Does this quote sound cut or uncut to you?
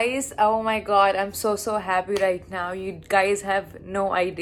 uncut